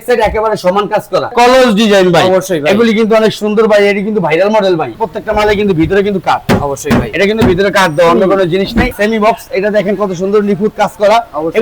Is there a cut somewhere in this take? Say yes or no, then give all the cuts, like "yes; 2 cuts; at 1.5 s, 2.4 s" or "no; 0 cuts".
yes; 3 cuts; at 1.3 s, 5.0 s, 8.9 s